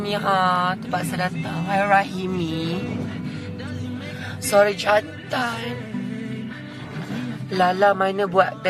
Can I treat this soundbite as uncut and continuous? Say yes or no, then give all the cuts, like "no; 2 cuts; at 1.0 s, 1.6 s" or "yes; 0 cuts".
no; 1 cut; at 7.6 s